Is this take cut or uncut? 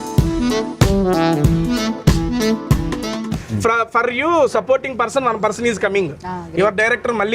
uncut